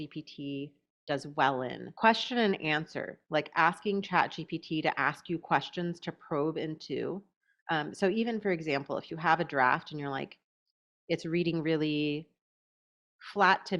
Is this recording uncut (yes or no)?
no